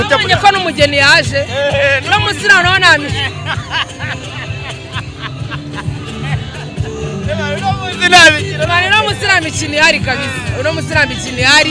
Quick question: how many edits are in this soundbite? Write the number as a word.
zero